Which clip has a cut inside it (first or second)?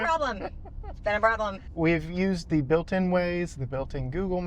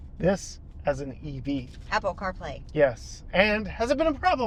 first